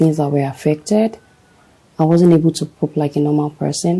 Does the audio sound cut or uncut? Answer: uncut